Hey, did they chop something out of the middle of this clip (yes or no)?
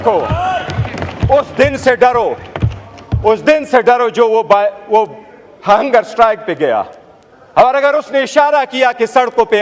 no